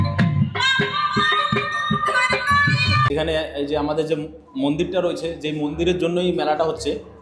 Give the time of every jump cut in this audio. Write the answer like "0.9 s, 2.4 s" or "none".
3.1 s